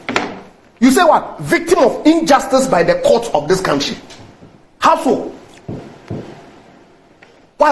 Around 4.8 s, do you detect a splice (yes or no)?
no